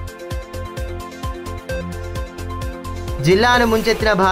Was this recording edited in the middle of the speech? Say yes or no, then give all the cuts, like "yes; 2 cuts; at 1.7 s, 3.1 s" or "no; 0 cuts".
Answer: no; 0 cuts